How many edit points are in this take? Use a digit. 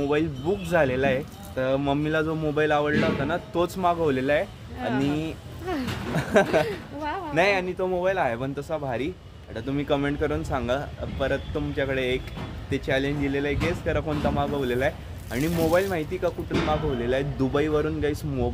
0